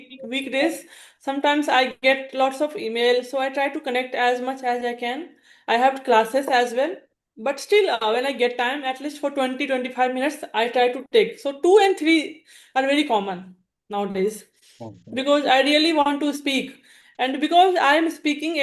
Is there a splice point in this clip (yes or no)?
no